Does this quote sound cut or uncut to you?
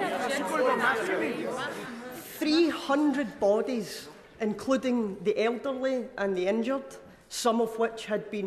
uncut